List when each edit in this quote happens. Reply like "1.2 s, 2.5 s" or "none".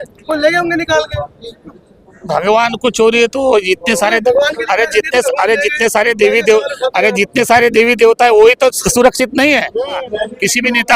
10.0 s